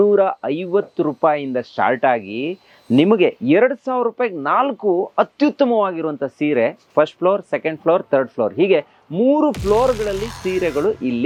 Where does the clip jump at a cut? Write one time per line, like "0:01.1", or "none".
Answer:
none